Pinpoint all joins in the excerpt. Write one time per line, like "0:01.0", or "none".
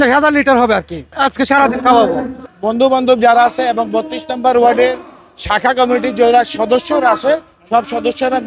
none